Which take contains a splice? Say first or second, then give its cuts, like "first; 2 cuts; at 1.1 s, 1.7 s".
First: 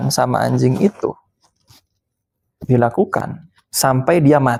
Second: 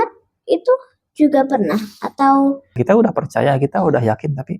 second; 1 cut; at 2.7 s